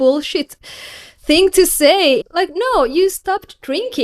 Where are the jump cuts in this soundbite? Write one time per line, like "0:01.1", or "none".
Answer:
0:02.3

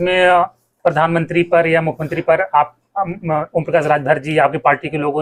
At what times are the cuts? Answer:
none

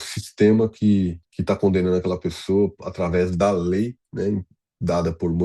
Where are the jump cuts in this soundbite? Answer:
0:01.3

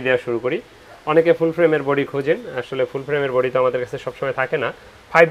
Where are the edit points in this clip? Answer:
none

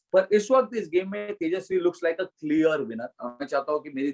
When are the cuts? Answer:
none

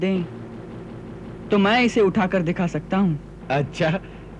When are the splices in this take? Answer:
0:03.3

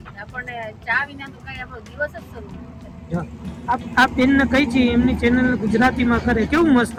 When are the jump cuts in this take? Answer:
none

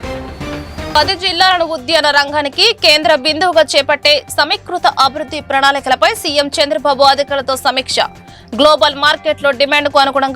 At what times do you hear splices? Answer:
0:00.9

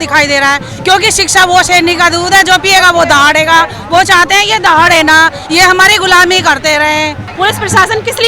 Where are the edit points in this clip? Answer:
0:07.2

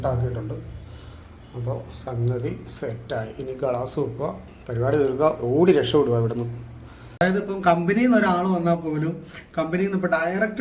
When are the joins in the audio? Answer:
0:07.2

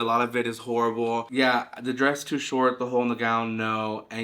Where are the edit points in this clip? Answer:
0:01.2

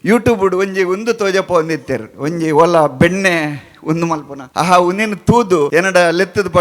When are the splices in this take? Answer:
0:04.4
0:05.7

